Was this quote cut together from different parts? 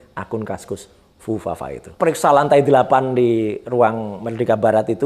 yes; 1 cut; at 2.0 s

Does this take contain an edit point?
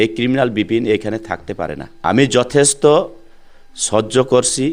yes; 1 cut; at 1.9 s

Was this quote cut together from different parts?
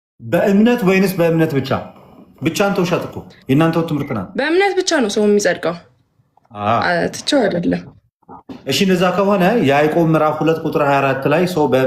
yes; 1 cut; at 4.2 s

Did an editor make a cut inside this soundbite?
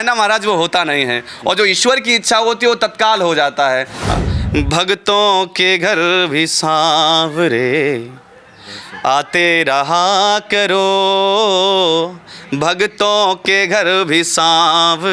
yes; 1 cut; at 4.1 s

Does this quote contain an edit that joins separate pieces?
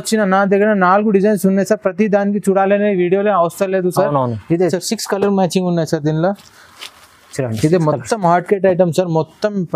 yes; 1 cut; at 4.8 s

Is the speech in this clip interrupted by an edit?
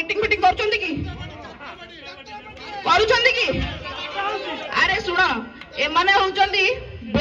no; 0 cuts

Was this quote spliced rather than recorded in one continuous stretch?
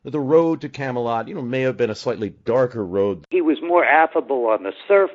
yes; 1 cut; at 3.3 s

